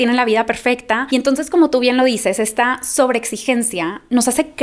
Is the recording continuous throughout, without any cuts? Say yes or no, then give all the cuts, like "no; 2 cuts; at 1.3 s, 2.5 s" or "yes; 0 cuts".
yes; 0 cuts